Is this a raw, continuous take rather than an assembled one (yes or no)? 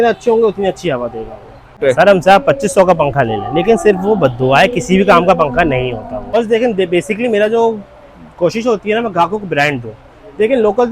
no